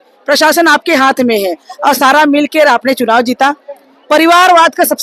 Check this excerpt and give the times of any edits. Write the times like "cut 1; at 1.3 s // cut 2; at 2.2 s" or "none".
none